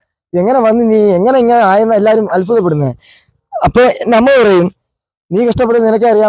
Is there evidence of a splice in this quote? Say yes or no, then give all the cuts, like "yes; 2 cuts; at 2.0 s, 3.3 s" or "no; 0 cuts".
no; 0 cuts